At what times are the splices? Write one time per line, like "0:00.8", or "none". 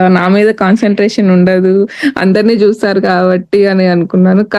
none